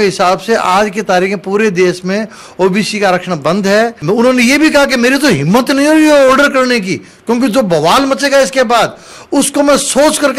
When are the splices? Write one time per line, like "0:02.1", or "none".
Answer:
0:04.0